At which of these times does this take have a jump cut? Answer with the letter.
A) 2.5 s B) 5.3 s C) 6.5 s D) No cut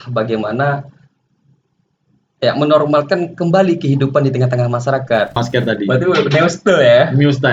B